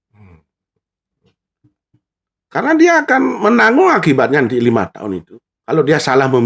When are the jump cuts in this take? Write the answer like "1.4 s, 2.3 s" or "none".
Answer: none